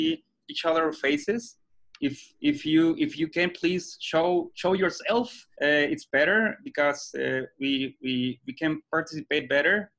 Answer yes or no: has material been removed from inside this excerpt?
yes